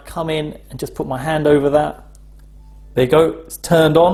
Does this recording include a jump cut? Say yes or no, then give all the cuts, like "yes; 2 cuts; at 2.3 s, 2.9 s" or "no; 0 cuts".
no; 0 cuts